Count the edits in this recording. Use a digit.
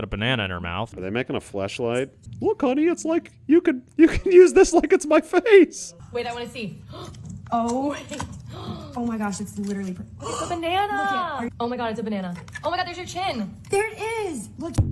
4